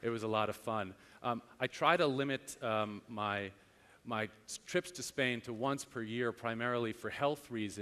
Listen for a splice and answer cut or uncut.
cut